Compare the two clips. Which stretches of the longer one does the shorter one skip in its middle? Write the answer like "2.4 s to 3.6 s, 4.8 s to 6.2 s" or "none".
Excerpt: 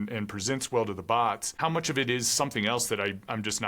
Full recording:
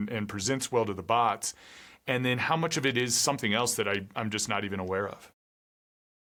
1.5 s to 2.4 s